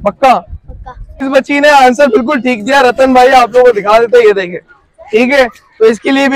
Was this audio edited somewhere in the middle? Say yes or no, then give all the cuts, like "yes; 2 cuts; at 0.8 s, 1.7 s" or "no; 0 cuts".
yes; 1 cut; at 1.3 s